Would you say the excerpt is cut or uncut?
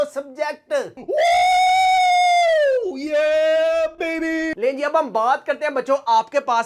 uncut